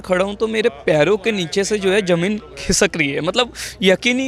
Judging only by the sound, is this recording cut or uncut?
uncut